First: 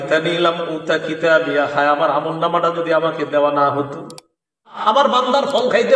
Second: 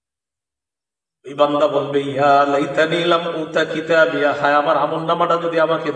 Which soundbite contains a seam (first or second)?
first